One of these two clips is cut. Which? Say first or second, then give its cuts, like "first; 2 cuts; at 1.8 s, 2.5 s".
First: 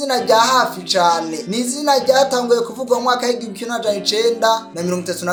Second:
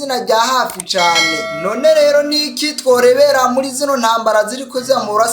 second; 1 cut; at 1.4 s